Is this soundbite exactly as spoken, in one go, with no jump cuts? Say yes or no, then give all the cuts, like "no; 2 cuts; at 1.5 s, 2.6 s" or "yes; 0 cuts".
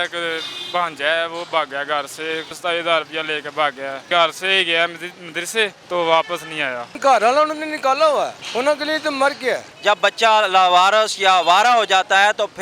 no; 6 cuts; at 2.5 s, 4.0 s, 5.8 s, 6.9 s, 8.4 s, 9.7 s